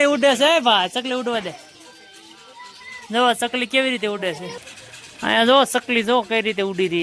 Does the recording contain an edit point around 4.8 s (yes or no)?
no